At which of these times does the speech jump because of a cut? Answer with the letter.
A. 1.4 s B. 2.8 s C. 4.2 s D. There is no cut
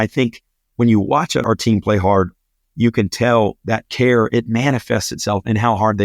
A